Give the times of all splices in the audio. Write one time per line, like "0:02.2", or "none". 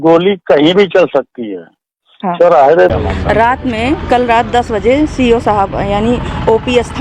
0:02.9